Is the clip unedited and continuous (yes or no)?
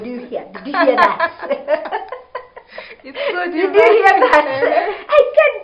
yes